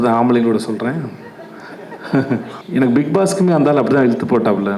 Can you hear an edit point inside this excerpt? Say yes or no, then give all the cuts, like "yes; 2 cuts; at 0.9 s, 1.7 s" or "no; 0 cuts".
yes; 1 cut; at 2.6 s